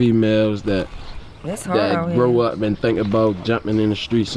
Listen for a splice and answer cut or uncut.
uncut